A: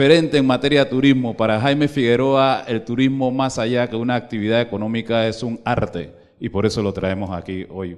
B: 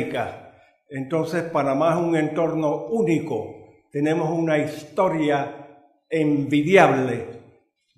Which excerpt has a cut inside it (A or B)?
B